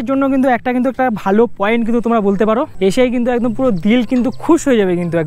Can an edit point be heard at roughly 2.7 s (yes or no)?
yes